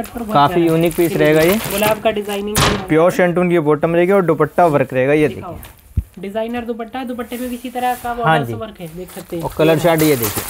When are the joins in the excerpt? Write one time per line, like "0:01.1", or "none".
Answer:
none

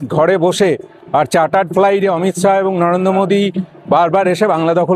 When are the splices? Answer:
none

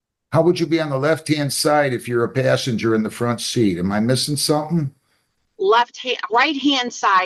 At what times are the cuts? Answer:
none

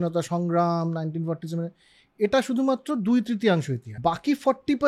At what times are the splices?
0:03.8

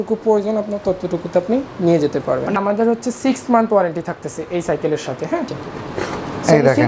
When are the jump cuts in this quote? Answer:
0:02.6
0:05.5

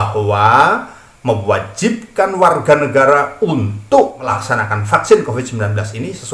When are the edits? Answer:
0:04.4

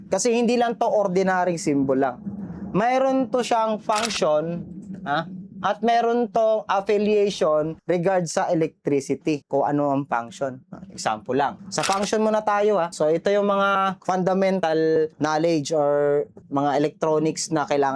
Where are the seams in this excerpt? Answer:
none

